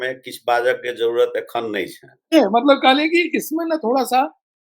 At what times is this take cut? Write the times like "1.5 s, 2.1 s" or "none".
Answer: 2.2 s